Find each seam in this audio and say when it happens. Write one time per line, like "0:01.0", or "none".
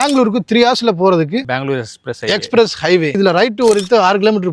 0:01.5
0:03.1